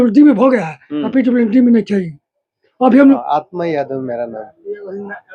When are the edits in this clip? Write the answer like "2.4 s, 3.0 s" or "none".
3.2 s